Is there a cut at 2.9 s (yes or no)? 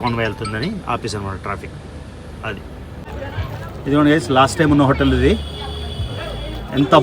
yes